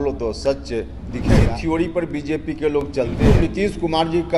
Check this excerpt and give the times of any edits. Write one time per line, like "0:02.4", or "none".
0:01.3
0:03.2